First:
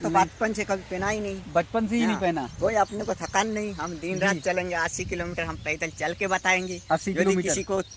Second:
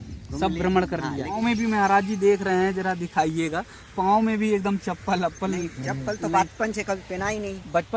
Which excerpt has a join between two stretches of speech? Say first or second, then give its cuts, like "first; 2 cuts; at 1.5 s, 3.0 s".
second; 1 cut; at 1.4 s